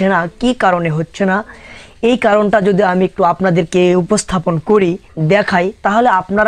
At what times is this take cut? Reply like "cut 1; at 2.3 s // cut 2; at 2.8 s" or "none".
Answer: none